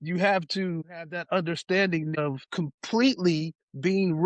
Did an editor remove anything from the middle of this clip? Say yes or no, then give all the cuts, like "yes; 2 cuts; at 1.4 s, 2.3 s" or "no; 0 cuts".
yes; 2 cuts; at 0.9 s, 2.3 s